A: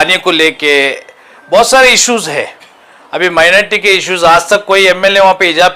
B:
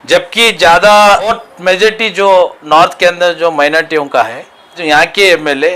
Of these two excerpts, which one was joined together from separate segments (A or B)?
B